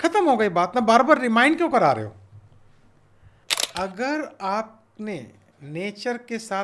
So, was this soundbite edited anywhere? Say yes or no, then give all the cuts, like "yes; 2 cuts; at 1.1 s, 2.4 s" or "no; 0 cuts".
yes; 1 cut; at 3.4 s